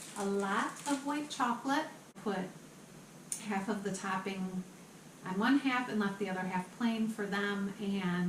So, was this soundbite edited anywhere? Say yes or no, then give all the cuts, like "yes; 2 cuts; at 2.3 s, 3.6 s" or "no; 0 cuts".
yes; 1 cut; at 2.2 s